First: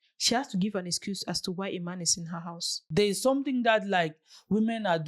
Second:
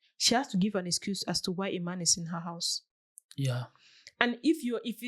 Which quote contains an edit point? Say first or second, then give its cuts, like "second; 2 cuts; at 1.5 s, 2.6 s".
first; 1 cut; at 2.8 s